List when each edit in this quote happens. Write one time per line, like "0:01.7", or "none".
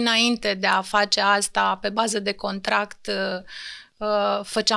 none